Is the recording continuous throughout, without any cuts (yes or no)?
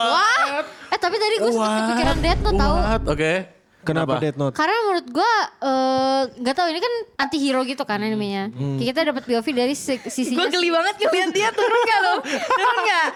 yes